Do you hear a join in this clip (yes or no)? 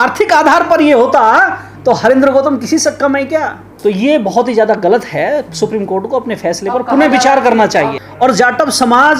yes